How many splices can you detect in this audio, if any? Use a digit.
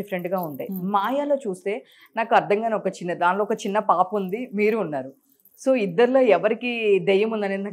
0